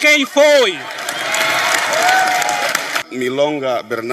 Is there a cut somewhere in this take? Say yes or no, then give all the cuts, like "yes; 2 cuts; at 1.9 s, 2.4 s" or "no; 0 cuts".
yes; 1 cut; at 3.0 s